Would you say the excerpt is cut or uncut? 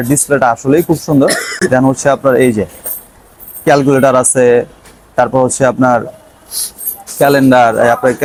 uncut